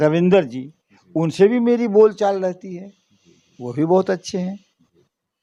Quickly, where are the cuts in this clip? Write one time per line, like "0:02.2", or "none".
none